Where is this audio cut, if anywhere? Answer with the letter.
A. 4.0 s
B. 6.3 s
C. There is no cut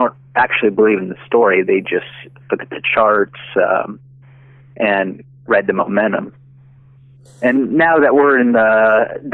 B